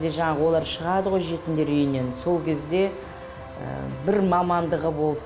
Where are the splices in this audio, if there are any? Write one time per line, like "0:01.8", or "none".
none